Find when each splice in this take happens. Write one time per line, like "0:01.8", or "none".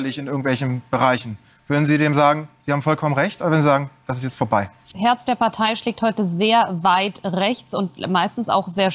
0:04.9